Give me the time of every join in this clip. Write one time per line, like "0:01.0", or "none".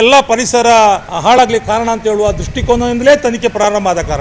0:01.1

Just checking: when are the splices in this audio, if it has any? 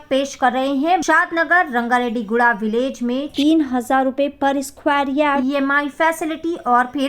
0:01.0

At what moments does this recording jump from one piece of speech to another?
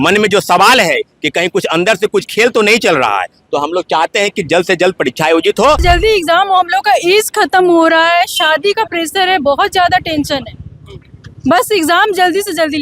0:05.8

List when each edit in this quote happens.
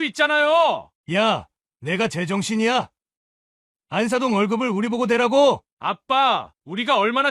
0:00.9

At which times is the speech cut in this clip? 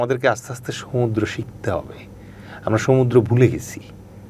none

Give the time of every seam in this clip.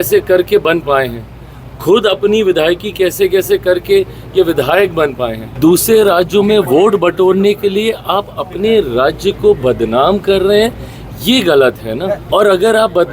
0:05.4
0:12.2

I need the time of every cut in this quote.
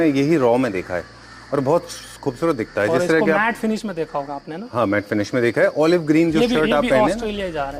none

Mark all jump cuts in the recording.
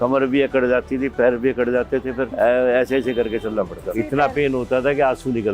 0:02.3
0:03.9

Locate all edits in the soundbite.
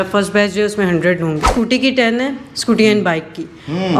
0:01.5

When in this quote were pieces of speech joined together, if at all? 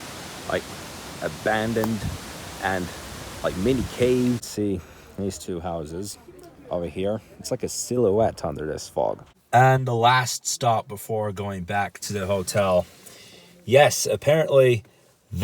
0:04.5
0:09.3

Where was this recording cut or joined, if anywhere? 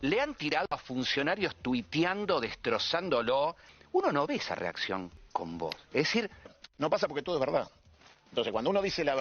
0:03.7
0:05.2
0:06.6

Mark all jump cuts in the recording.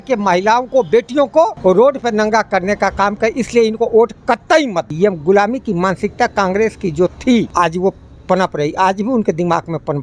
0:04.9

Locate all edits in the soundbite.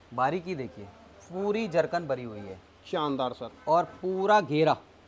none

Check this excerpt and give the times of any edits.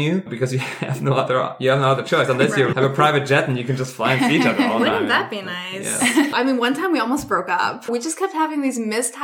0:02.7
0:06.3
0:07.9

